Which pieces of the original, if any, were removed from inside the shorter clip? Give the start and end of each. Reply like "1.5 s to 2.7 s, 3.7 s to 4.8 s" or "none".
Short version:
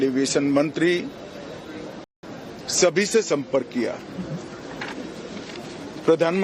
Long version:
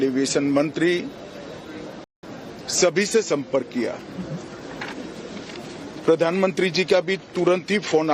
none